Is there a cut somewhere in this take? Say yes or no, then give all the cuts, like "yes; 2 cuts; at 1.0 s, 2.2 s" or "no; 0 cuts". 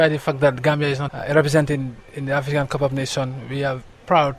yes; 1 cut; at 1.0 s